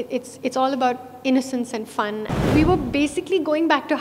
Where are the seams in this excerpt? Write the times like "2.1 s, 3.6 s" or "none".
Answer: 2.5 s